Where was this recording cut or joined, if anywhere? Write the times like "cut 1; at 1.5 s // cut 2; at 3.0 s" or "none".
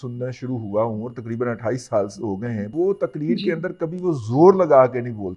cut 1; at 2.7 s